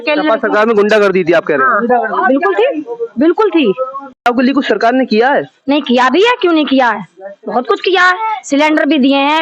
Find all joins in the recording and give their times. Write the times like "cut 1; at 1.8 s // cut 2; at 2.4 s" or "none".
cut 1; at 4.3 s